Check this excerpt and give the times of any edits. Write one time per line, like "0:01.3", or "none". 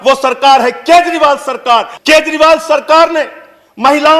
0:01.9